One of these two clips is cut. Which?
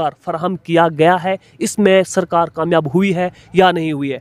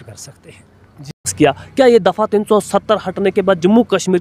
second; 1 cut; at 1.2 s

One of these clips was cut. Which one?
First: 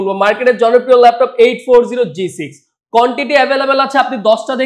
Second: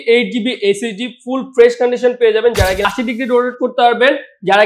second; 1 cut; at 2.8 s

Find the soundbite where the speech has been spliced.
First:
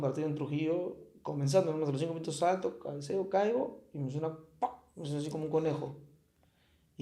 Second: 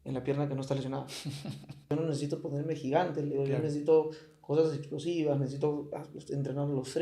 second; 1 cut; at 1.9 s

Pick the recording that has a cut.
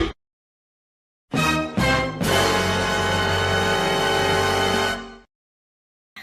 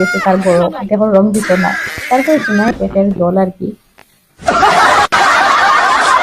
second; 1 cut; at 2.7 s

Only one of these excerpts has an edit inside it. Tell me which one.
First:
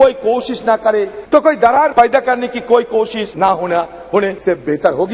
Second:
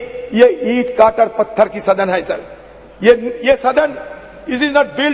first; 4 cuts; at 1.2 s, 1.9 s, 3.2 s, 4.4 s

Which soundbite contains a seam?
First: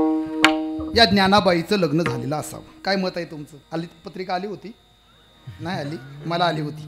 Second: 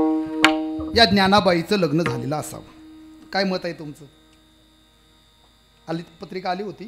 first; 2 cuts; at 2.6 s, 3.5 s

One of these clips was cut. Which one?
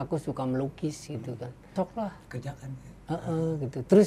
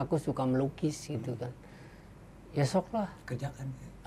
first; 1 cut; at 1.7 s

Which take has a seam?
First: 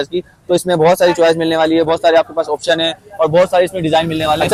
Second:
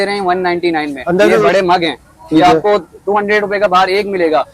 second; 1 cut; at 1.4 s

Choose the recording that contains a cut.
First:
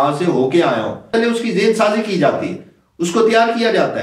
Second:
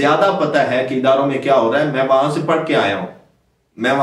first; 1 cut; at 1.1 s

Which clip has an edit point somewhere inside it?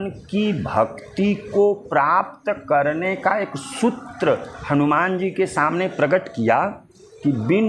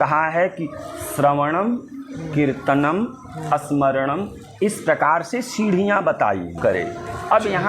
second; 1 cut; at 6.6 s

